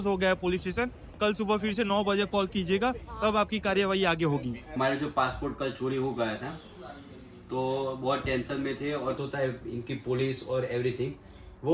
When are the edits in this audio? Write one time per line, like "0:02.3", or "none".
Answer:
0:04.7
0:09.2